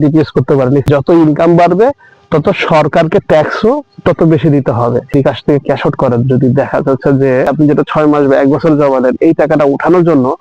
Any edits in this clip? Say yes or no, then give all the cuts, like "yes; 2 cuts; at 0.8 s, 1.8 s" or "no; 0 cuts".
yes; 3 cuts; at 0.9 s, 5.1 s, 7.5 s